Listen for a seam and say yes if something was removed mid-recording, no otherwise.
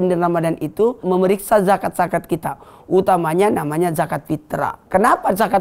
yes